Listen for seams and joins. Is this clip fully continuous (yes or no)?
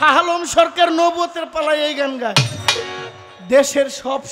yes